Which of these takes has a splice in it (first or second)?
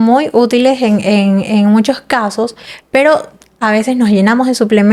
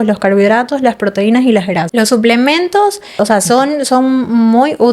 second